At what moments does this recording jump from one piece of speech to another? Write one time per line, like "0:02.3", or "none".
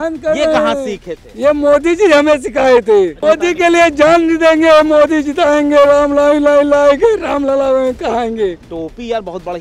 0:03.2
0:08.6